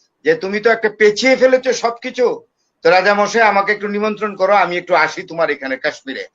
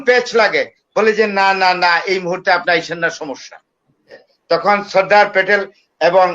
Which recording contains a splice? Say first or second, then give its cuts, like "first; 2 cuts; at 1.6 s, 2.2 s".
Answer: second; 1 cut; at 4.3 s